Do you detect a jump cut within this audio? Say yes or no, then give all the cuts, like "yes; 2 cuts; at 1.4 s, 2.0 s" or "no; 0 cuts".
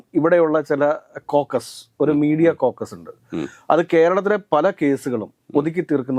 no; 0 cuts